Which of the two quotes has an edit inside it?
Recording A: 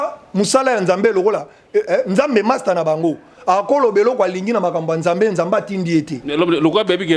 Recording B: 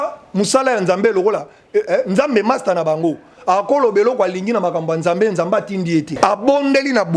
B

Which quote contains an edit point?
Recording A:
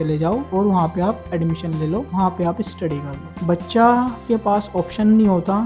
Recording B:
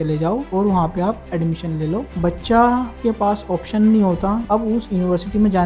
B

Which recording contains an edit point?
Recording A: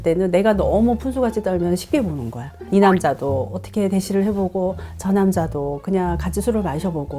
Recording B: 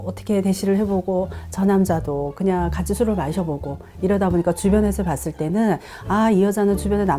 A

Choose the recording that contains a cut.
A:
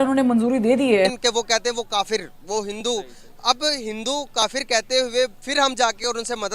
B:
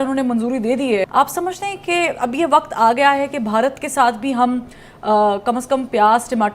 A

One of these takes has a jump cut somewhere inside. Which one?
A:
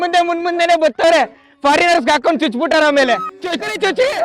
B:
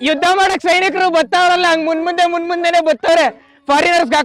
A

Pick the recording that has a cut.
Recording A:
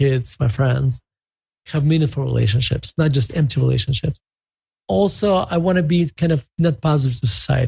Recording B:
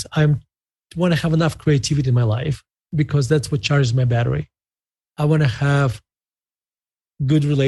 A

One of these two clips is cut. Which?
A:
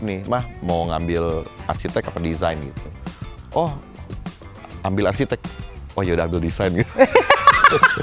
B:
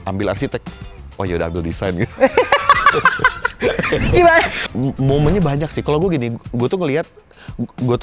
B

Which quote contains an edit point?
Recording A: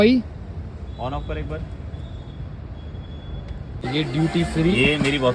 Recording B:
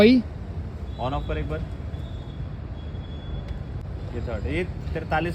A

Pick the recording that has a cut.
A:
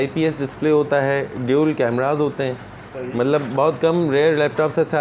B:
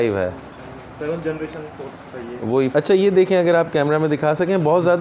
B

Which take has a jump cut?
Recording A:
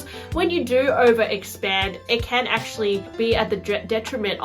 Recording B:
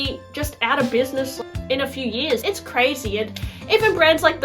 B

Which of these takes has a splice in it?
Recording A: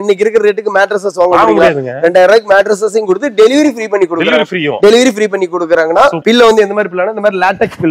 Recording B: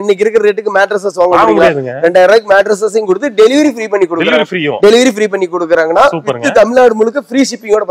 A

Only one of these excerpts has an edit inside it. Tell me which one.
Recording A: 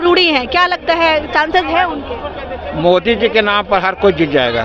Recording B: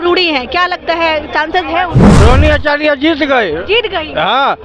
B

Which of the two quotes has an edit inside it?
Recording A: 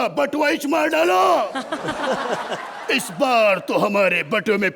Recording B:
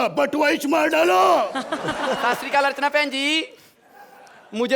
B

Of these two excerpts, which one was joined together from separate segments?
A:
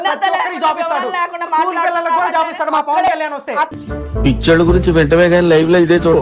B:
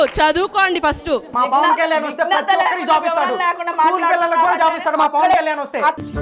B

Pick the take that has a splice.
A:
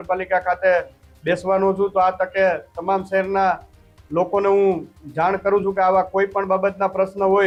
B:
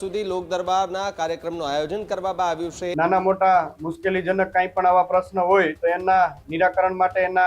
B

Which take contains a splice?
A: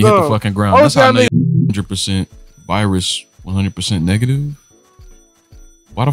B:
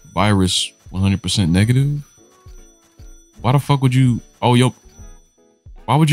A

